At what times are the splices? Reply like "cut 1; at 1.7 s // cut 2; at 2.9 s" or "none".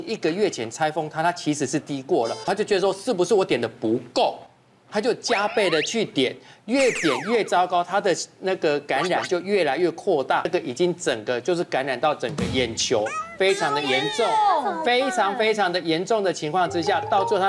cut 1; at 2.5 s // cut 2; at 10.5 s